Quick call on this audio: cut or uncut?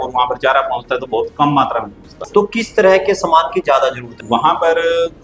cut